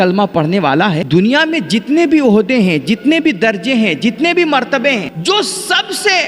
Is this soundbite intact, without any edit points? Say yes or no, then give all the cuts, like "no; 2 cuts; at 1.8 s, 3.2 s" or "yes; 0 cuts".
no; 2 cuts; at 1.0 s, 5.1 s